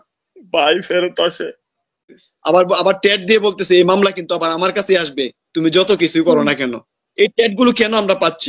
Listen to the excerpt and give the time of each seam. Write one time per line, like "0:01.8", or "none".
0:02.3